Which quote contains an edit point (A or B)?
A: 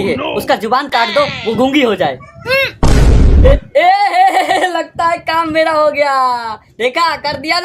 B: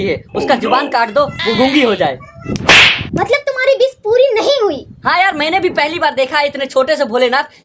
B